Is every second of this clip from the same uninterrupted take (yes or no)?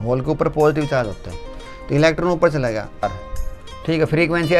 no